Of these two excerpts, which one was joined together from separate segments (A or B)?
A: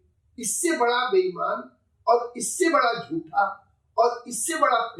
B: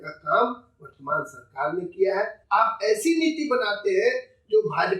B